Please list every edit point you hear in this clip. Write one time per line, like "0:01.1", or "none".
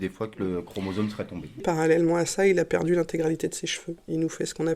0:01.6